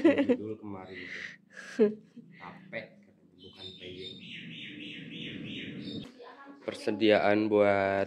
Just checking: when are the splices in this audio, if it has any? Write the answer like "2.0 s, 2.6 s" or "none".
6.0 s